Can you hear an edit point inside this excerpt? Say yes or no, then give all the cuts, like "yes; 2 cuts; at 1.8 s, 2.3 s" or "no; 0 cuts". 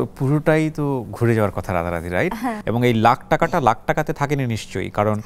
yes; 1 cut; at 2.6 s